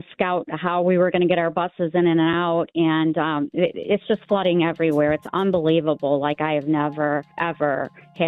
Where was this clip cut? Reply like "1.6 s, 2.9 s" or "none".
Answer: 7.3 s